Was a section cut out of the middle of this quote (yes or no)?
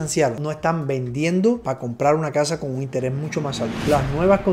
no